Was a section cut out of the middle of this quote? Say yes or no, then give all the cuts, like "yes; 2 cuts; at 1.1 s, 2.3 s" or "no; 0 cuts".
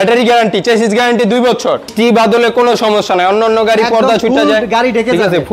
yes; 1 cut; at 1.9 s